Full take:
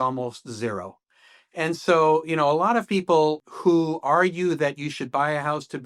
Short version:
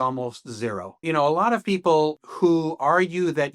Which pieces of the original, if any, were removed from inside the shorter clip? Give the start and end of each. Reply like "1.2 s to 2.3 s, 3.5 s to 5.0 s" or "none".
1.0 s to 2.3 s